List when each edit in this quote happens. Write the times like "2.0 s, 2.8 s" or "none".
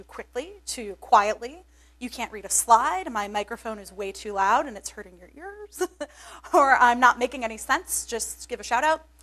7.0 s